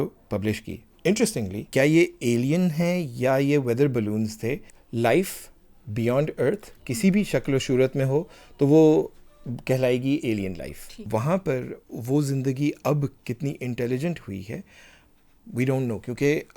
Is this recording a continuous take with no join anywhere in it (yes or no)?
no